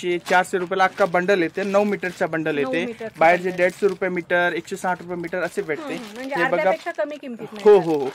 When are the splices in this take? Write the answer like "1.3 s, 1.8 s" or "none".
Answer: none